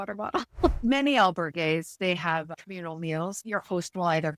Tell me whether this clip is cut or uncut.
cut